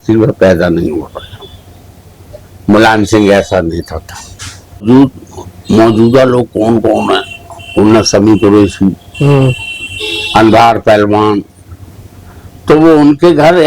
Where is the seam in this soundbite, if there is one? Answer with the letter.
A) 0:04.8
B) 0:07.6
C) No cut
A